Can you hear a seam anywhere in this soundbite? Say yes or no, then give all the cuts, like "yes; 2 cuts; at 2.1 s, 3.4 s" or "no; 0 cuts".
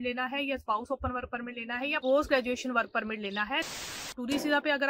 yes; 2 cuts; at 2.0 s, 3.7 s